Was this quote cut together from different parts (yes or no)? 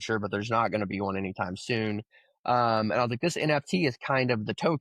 no